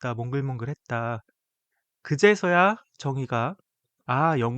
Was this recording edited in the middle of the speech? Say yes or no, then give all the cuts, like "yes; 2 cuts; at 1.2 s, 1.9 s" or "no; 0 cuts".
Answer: no; 0 cuts